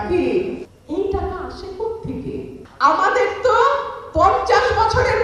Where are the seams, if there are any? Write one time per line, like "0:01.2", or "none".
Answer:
0:02.6